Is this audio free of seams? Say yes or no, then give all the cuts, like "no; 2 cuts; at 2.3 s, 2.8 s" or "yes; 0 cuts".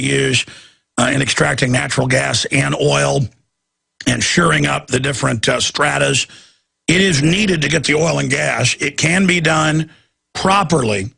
yes; 0 cuts